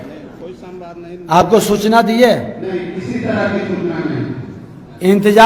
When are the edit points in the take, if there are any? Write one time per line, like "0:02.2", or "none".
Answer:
none